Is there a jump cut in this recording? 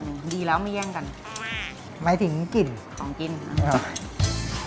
no; 0 cuts

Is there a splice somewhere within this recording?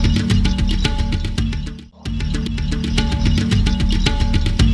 yes; 1 cut; at 2.5 s

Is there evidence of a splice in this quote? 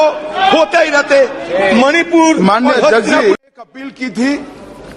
yes; 1 cut; at 3.4 s

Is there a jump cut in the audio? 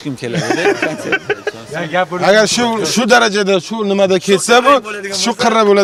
no; 0 cuts

